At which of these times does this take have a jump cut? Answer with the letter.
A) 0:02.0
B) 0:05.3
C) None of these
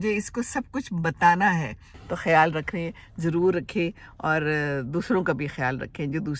A